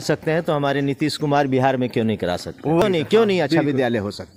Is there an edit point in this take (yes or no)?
no